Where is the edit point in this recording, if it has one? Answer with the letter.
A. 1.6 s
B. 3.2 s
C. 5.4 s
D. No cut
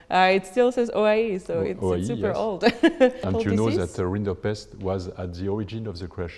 B